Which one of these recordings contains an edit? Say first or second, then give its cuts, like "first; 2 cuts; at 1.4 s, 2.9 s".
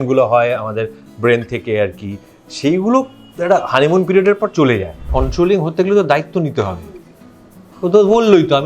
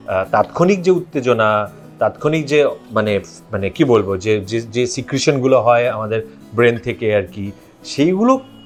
first; 1 cut; at 5.0 s